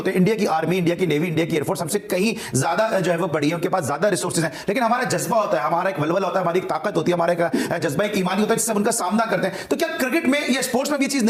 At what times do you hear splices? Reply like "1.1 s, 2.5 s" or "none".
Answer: none